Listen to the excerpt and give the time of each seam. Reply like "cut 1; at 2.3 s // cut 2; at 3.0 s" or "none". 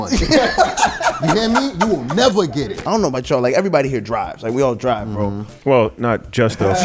cut 1; at 2.7 s